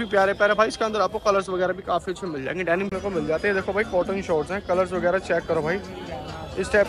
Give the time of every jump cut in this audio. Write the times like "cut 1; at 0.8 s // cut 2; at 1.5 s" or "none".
cut 1; at 2.9 s